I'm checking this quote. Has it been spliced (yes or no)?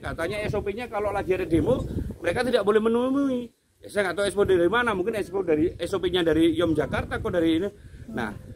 no